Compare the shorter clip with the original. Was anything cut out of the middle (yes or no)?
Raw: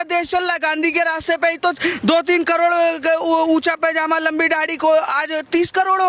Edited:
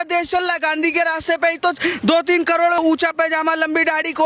yes